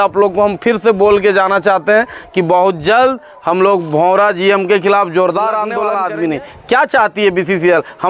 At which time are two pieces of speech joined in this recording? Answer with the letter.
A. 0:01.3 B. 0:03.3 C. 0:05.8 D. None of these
C